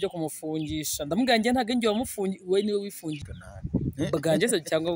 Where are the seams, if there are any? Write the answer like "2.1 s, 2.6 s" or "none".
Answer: 3.3 s